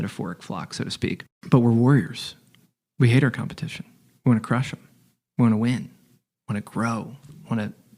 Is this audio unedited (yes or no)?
no